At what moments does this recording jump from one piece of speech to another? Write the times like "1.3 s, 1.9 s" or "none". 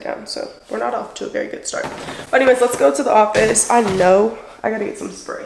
none